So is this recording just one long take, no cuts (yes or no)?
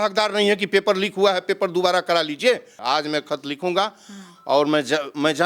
no